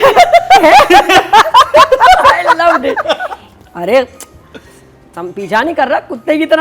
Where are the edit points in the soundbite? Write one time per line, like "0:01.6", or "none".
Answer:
none

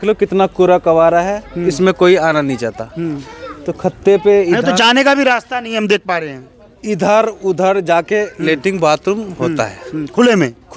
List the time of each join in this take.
none

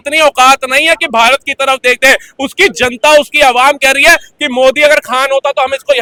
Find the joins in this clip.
none

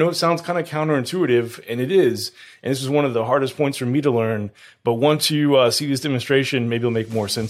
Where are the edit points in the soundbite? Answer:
none

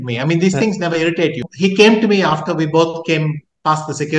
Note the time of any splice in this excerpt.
0:01.5

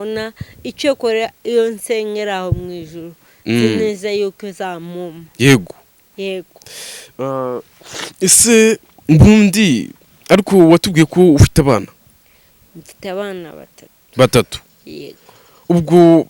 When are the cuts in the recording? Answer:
none

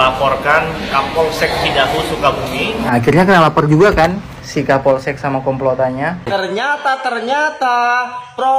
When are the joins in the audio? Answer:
0:02.8
0:06.2

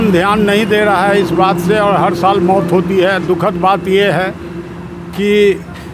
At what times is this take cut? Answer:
none

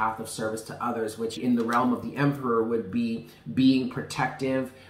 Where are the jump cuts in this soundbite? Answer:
0:01.4

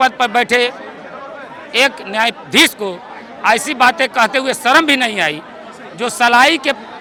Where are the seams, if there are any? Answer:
none

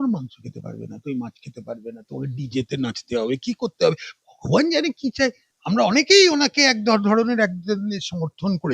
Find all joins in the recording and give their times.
0:05.5

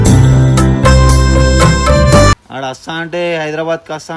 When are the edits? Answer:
0:02.5

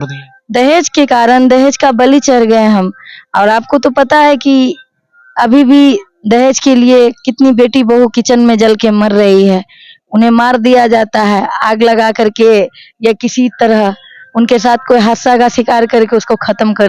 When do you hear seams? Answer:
none

